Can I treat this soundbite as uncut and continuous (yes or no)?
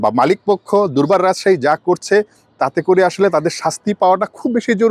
yes